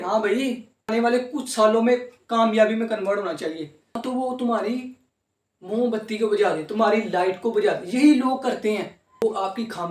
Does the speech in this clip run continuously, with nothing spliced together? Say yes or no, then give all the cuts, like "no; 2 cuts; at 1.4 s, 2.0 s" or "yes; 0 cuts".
no; 3 cuts; at 0.9 s, 4.0 s, 9.2 s